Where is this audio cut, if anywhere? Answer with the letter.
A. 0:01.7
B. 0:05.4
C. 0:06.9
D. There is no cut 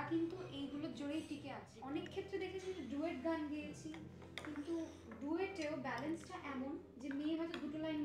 A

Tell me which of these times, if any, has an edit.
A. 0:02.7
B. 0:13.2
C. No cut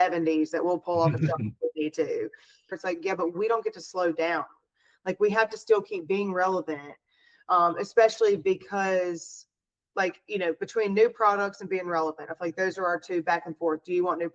A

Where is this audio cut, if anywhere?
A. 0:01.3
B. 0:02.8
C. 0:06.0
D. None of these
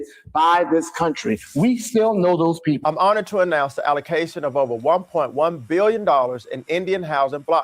B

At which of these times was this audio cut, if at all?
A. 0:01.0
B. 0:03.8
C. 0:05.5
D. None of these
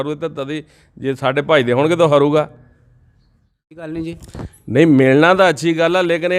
B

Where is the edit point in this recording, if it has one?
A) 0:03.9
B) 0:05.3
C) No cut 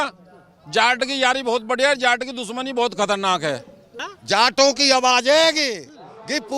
A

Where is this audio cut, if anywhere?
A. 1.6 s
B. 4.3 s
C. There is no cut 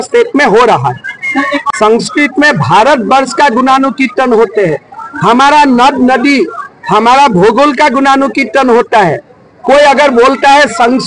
A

